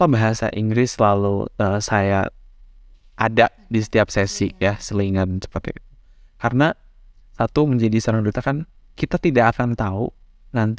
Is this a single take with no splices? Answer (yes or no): yes